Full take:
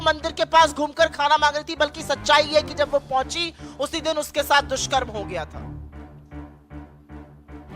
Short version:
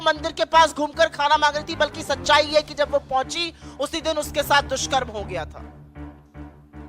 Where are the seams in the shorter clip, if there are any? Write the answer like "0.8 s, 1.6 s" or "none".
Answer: 5.5 s